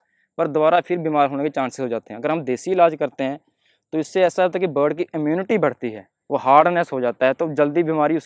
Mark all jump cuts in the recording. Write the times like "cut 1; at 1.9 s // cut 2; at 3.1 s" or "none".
none